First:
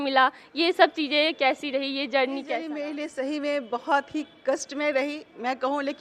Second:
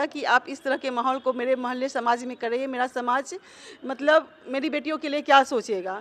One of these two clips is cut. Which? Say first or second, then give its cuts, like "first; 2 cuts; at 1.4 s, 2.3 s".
first; 1 cut; at 2.7 s